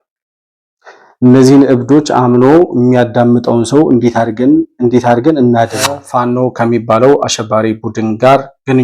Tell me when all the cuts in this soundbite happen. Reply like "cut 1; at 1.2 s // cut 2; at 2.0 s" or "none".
cut 1; at 6.0 s